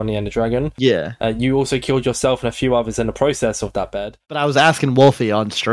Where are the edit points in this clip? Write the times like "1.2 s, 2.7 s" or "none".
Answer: 4.2 s

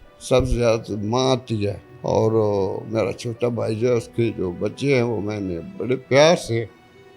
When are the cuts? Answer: 1.9 s

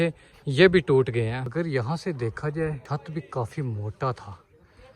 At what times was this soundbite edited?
1.4 s, 2.8 s

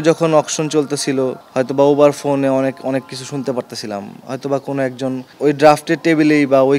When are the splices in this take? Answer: 1.4 s, 5.3 s

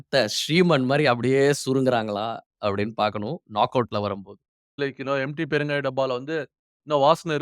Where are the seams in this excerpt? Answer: 4.8 s

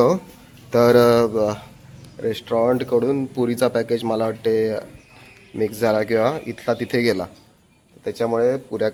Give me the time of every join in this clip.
none

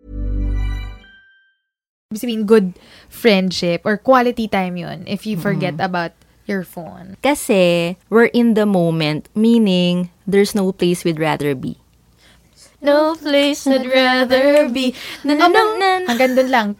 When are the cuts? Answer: 2.0 s

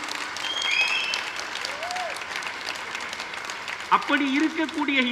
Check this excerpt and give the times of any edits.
none

